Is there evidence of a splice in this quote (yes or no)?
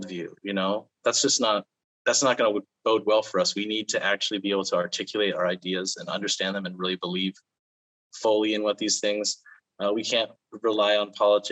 yes